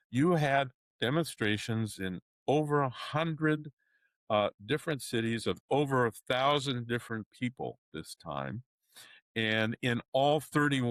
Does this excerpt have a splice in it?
no; 0 cuts

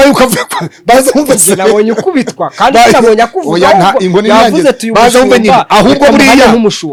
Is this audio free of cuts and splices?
yes; 0 cuts

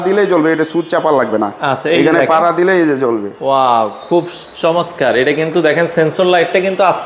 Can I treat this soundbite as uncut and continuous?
yes; 0 cuts

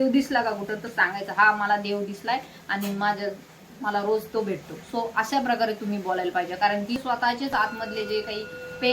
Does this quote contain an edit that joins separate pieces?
yes; 1 cut; at 7.0 s

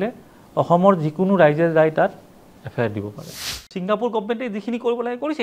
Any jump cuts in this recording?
yes; 1 cut; at 3.5 s

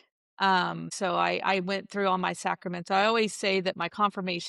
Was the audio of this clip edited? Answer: yes; 1 cut; at 0.9 s

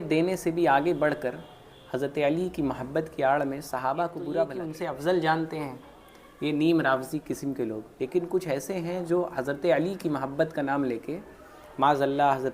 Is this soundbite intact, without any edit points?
no; 1 cut; at 4.6 s

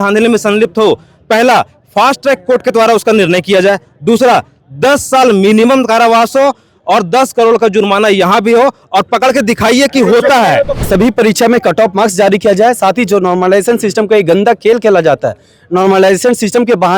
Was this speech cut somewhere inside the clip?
yes; 1 cut; at 10.8 s

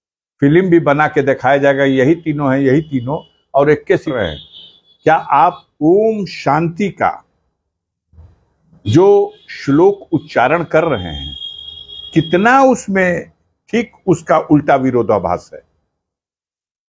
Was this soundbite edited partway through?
yes; 1 cut; at 4.1 s

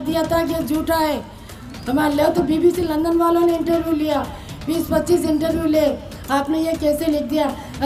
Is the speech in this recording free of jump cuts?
yes; 0 cuts

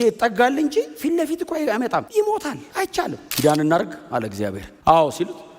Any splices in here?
yes; 3 cuts; at 2.1 s, 3.2 s, 4.7 s

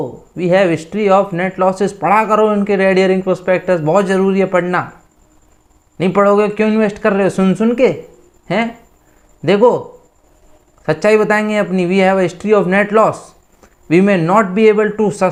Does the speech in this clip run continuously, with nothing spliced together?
yes; 0 cuts

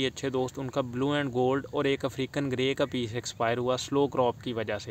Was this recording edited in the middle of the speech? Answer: no; 0 cuts

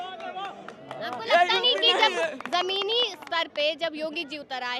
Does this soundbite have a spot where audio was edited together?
no; 0 cuts

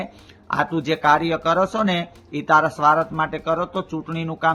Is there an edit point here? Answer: no; 0 cuts

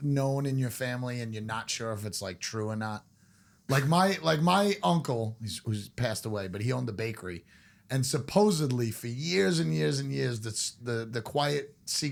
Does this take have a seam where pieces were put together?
no; 0 cuts

